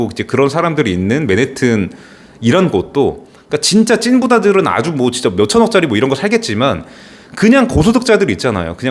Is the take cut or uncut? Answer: uncut